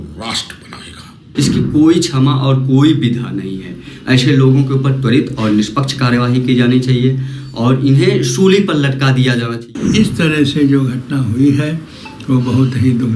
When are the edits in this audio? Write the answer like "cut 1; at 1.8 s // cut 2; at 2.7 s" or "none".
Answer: cut 1; at 1.2 s // cut 2; at 9.7 s

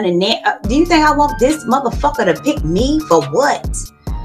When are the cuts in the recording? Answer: none

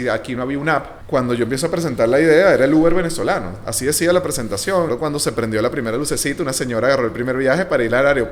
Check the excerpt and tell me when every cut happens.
cut 1; at 1.0 s // cut 2; at 4.9 s

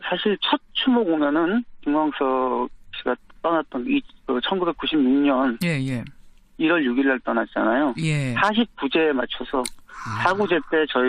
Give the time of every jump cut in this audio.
cut 1; at 3.7 s

